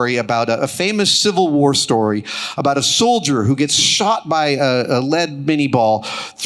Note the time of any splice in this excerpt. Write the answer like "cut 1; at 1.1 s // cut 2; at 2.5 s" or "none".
none